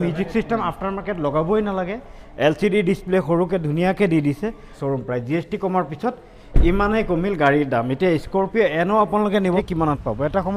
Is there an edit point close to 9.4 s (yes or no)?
yes